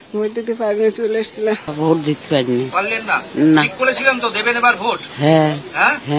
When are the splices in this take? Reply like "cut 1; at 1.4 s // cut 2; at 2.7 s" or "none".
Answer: cut 1; at 1.7 s